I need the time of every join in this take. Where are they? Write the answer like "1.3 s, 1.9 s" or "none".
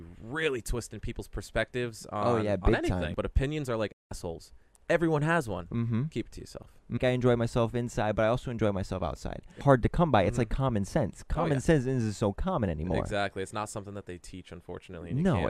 3.1 s, 7.0 s, 9.6 s